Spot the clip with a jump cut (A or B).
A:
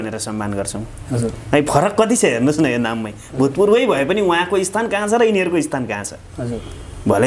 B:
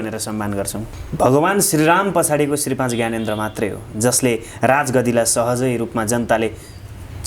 B